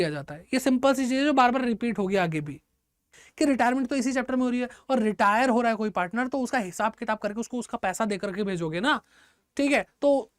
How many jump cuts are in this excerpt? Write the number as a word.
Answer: one